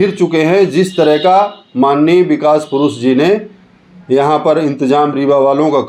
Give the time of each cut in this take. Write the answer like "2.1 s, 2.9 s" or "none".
none